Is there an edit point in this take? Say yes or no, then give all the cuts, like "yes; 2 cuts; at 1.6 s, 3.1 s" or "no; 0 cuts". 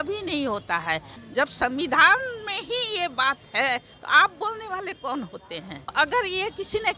yes; 2 cuts; at 1.2 s, 5.9 s